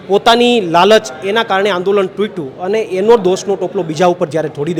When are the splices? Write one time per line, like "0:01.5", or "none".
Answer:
none